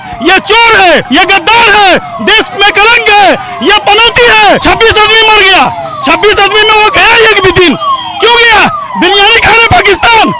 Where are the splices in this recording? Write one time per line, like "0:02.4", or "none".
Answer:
0:01.0
0:04.6